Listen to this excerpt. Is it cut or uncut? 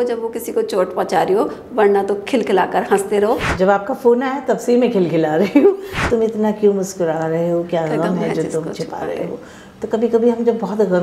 cut